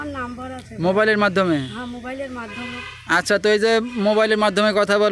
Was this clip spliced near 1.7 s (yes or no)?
no